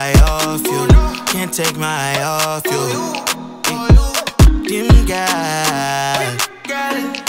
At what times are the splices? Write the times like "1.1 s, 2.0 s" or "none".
none